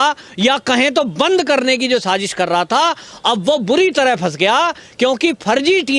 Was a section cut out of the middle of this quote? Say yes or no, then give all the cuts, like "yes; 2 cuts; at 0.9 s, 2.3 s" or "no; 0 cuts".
no; 0 cuts